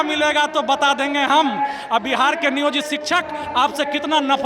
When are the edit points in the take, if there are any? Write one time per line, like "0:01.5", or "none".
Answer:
none